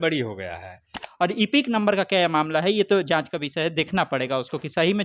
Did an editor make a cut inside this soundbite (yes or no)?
yes